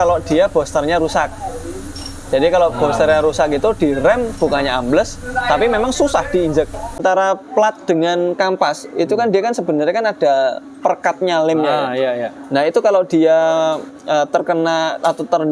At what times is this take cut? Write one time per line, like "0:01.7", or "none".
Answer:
0:07.0